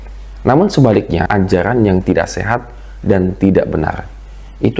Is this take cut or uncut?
cut